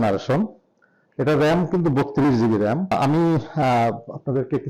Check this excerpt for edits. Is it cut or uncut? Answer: cut